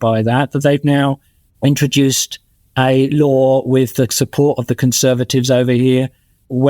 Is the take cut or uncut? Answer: uncut